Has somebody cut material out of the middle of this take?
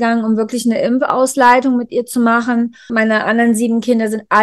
yes; 1 cut; at 2.9 s

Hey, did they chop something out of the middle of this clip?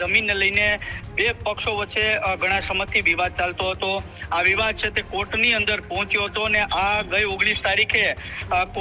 no; 0 cuts

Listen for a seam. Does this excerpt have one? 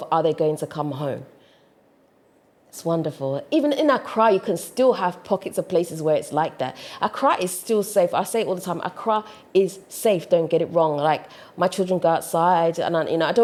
no; 0 cuts

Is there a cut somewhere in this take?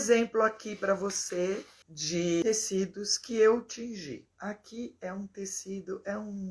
yes; 2 cuts; at 2.0 s, 4.3 s

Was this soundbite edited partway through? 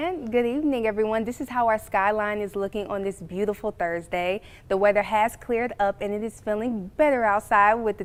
no; 0 cuts

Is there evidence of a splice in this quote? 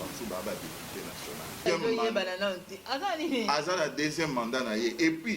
yes; 1 cut; at 1.6 s

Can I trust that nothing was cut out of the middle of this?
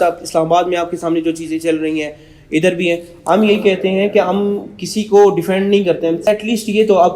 no; 1 cut; at 6.2 s

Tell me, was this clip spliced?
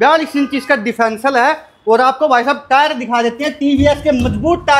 no; 0 cuts

